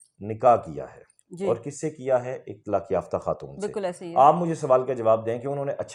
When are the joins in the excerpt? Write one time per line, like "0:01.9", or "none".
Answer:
none